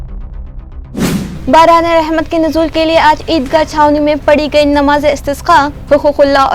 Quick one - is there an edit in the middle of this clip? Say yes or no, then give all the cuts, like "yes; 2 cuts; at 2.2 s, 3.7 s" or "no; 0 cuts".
yes; 1 cut; at 1.3 s